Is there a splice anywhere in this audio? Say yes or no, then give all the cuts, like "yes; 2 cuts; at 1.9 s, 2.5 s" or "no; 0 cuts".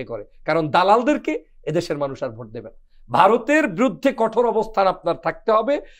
no; 0 cuts